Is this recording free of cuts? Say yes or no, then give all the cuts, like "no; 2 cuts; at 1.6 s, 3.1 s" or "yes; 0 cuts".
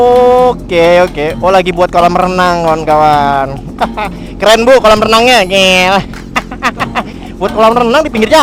yes; 0 cuts